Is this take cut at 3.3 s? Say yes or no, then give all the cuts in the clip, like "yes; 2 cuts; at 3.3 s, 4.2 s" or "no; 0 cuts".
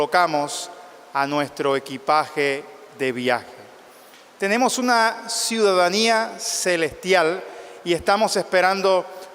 yes; 1 cut; at 3.3 s